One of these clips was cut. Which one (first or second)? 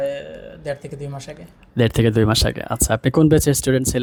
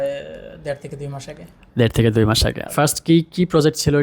second